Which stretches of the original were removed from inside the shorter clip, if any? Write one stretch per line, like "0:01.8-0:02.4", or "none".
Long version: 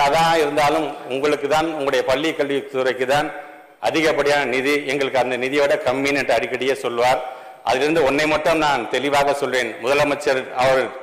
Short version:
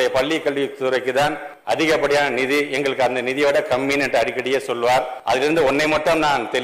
0:03.4-0:03.6
0:07.3-0:07.5